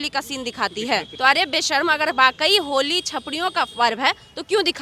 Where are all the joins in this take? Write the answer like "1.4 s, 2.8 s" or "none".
1.1 s